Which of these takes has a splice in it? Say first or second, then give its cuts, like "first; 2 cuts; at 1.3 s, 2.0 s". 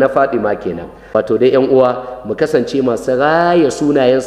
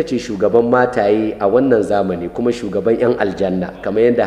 first; 1 cut; at 0.9 s